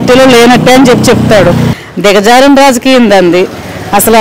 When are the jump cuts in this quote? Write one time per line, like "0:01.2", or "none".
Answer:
0:01.7